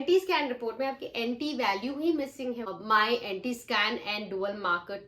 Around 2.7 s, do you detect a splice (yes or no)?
yes